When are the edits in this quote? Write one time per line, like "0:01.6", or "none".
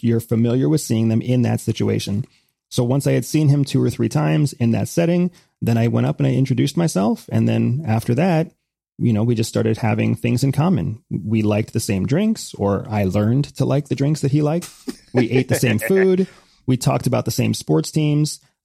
none